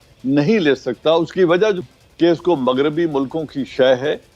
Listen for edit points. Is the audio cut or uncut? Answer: cut